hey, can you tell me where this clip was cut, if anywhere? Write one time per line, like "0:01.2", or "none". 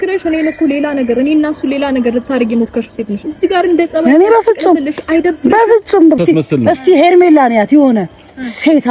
0:06.2